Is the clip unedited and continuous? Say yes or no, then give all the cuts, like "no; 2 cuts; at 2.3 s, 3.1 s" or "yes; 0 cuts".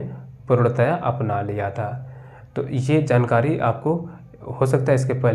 yes; 0 cuts